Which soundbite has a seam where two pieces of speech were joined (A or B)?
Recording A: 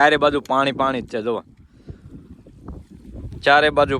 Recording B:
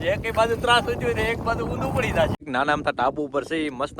B